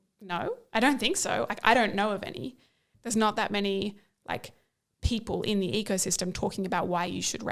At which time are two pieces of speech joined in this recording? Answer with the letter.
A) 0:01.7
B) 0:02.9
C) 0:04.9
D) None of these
B